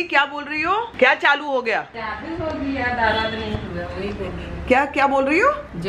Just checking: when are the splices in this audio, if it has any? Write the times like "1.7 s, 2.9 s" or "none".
0.9 s, 2.0 s

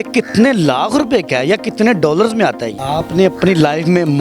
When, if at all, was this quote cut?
2.7 s

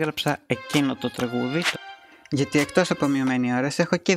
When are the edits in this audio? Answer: 2.1 s

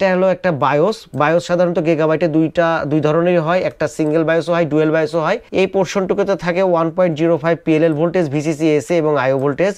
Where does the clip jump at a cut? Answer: 5.4 s

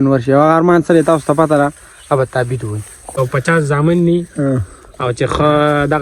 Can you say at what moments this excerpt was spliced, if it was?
3.1 s

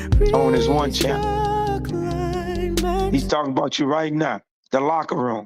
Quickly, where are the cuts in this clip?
3.1 s

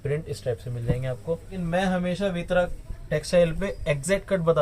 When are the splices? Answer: 1.6 s

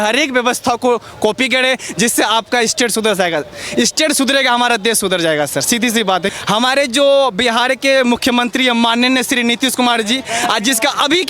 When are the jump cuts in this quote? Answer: 6.3 s

